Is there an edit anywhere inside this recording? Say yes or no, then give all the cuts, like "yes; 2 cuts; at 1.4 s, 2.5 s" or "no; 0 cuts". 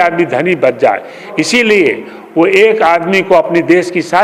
no; 0 cuts